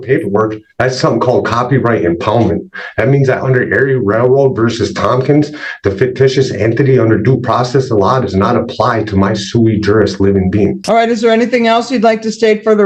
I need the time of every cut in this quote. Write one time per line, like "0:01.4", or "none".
none